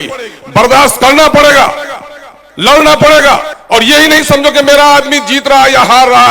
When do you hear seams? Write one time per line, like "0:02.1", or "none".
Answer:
none